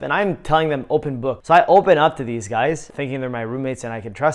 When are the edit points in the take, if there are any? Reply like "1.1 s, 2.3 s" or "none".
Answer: 1.4 s